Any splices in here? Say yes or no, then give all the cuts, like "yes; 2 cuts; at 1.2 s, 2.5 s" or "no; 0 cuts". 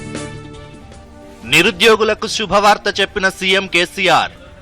yes; 1 cut; at 1.3 s